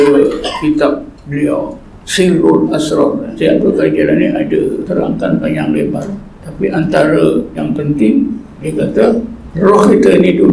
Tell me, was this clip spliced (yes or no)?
yes